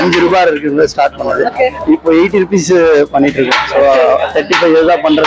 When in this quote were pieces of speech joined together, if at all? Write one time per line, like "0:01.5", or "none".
none